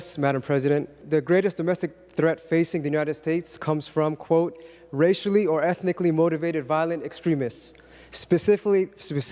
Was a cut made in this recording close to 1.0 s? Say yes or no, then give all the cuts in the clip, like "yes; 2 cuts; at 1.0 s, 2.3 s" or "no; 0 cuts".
yes; 1 cut; at 1.0 s